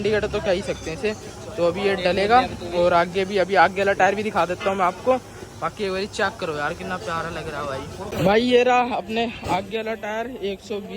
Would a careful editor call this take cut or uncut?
cut